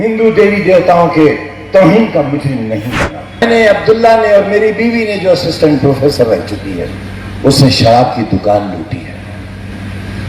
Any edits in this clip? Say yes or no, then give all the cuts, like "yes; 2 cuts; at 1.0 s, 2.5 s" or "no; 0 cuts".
yes; 1 cut; at 3.4 s